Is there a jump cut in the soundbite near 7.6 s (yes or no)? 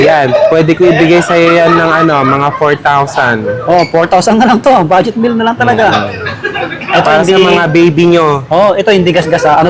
no